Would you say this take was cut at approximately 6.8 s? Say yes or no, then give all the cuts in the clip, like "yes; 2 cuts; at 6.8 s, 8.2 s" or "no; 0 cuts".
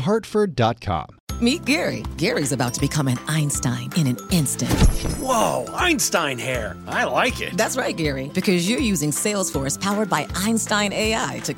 no; 1 cut; at 1.2 s